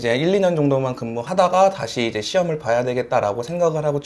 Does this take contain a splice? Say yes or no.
no